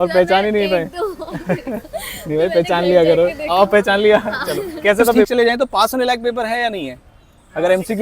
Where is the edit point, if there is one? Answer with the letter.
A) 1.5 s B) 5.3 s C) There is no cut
B